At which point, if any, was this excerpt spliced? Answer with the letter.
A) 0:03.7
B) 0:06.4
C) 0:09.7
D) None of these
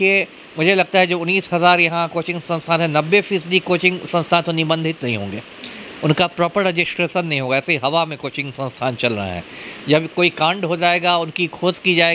D